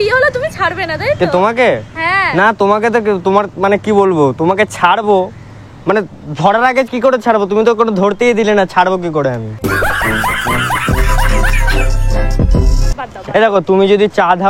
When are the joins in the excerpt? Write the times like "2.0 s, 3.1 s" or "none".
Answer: none

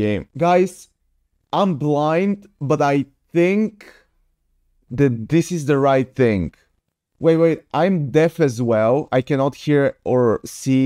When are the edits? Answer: none

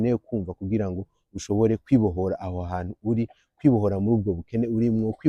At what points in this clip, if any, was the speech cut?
none

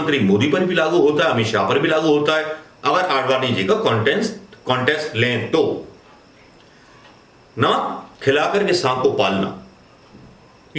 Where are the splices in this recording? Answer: none

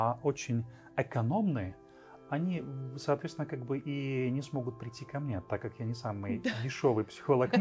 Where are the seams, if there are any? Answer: none

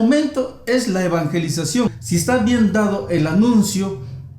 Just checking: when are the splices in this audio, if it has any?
2.0 s

